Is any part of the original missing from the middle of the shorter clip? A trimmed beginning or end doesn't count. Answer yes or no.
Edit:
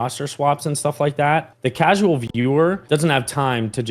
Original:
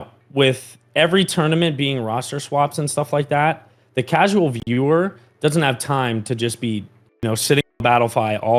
yes